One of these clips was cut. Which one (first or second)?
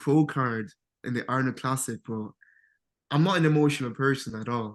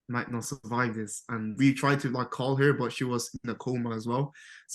second